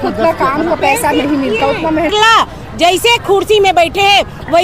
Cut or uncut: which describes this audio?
cut